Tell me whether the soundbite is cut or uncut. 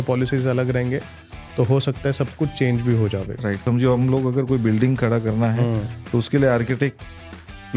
cut